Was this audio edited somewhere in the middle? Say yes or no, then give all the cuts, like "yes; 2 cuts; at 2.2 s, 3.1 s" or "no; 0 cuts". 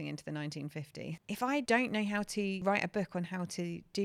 yes; 2 cuts; at 1.5 s, 2.6 s